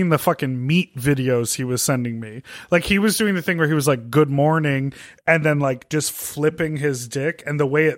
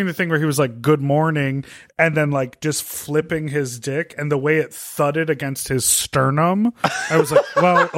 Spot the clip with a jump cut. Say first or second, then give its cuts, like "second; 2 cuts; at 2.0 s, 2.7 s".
first; 1 cut; at 1.0 s